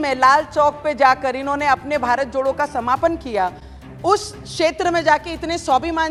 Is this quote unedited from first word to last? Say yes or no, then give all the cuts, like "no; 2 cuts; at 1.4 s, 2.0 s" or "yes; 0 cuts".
yes; 0 cuts